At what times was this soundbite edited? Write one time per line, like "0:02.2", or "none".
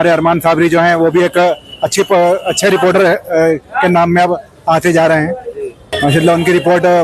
0:05.8